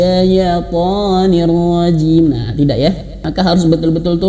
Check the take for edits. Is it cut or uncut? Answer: cut